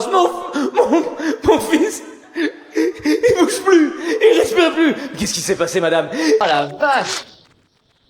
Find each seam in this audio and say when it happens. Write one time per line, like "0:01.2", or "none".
0:06.4